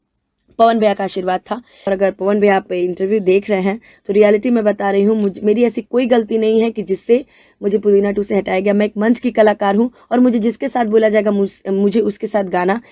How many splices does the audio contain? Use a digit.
1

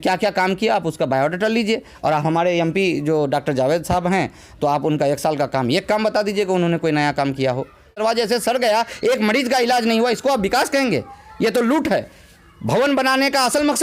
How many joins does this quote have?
1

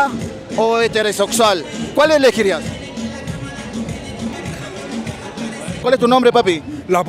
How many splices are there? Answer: 1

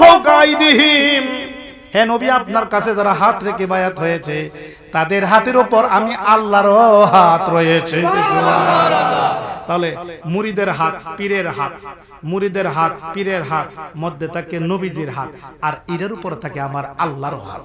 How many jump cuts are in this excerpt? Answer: 0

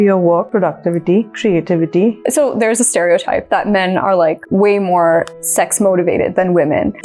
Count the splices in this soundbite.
2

